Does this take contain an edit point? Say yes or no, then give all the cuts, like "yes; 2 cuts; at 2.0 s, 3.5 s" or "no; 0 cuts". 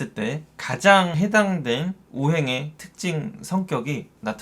yes; 1 cut; at 1.1 s